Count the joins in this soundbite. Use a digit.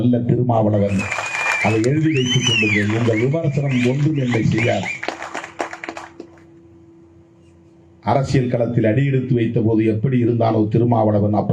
0